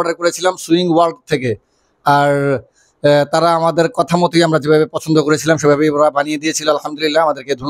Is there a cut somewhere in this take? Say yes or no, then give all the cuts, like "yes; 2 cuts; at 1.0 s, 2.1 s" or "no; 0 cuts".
no; 0 cuts